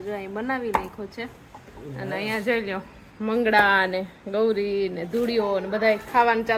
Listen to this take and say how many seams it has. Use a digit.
0